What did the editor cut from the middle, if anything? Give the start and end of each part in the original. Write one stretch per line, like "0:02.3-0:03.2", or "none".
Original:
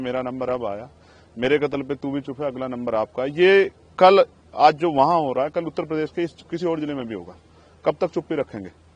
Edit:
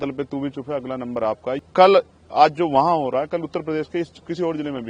0:03.3-0:03.8